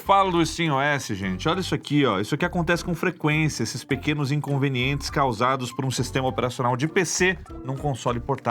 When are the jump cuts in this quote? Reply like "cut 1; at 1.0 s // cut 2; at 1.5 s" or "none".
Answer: none